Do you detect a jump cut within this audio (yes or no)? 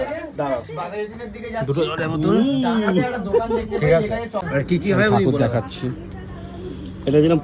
yes